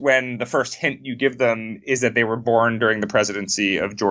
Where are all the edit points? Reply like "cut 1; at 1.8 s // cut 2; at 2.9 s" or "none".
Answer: none